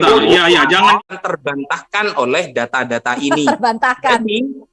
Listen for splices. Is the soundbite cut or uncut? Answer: cut